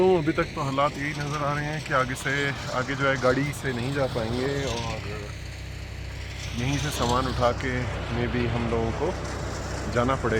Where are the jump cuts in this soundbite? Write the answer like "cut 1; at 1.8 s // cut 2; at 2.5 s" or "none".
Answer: none